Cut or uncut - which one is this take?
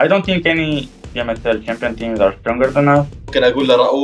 cut